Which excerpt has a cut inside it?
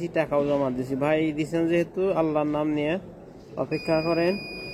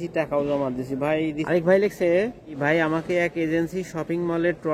second; 2 cuts; at 1.5 s, 2.6 s

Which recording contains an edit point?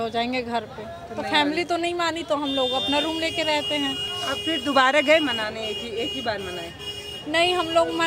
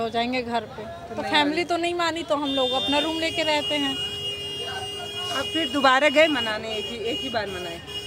first; 1 cut; at 4.1 s

